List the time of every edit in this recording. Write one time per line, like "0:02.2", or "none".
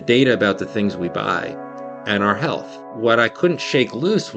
0:02.8